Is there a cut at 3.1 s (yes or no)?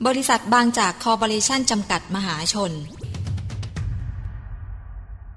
yes